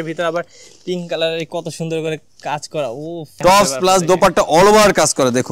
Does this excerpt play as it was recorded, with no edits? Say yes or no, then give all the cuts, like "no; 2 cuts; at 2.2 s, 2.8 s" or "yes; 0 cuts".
no; 1 cut; at 3.4 s